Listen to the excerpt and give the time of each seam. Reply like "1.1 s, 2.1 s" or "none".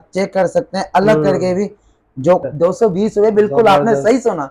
2.4 s